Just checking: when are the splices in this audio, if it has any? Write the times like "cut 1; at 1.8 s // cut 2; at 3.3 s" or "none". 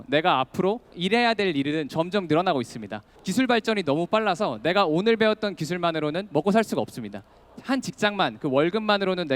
cut 1; at 0.9 s // cut 2; at 3.2 s // cut 3; at 7.5 s